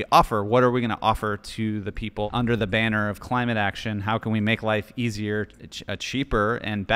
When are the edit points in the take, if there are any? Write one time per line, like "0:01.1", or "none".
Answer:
0:02.3